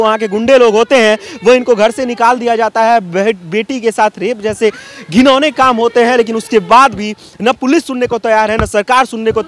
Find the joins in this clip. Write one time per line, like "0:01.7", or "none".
none